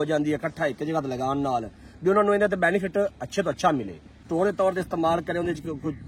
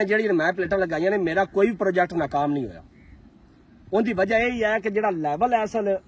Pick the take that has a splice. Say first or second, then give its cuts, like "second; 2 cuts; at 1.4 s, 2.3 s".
first; 1 cut; at 4.2 s